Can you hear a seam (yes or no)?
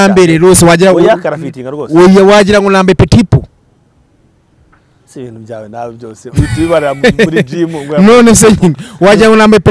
no